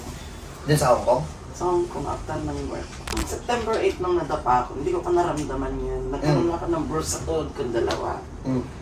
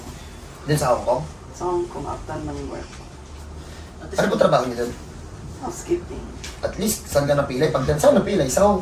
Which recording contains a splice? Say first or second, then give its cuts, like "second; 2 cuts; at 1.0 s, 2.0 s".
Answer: first; 1 cut; at 3.1 s